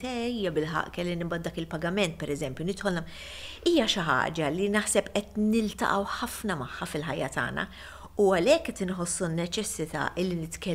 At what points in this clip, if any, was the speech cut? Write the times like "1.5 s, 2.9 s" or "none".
none